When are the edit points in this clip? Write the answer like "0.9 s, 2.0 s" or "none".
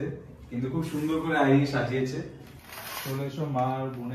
2.6 s